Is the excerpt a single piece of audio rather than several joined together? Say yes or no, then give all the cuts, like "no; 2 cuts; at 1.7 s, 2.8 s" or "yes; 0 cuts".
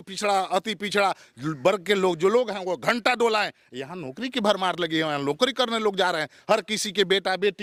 yes; 0 cuts